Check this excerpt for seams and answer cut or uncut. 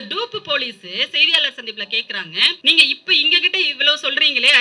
cut